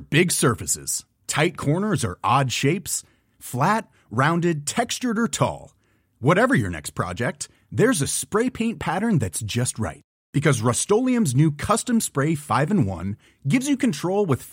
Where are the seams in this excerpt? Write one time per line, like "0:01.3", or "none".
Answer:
none